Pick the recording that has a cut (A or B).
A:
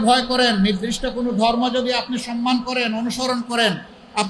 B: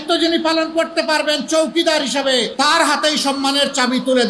B